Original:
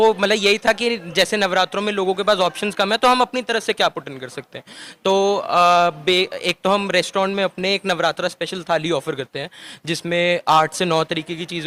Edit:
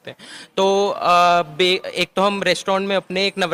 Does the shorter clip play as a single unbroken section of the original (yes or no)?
yes